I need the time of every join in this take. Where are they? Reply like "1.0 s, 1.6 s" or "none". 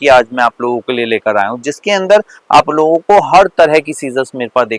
none